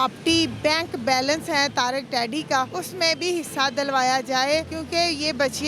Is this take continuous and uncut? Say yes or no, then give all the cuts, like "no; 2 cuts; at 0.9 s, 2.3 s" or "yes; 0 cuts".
no; 2 cuts; at 2.8 s, 4.8 s